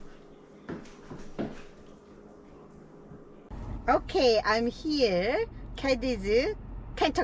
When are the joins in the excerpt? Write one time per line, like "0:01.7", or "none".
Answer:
0:03.5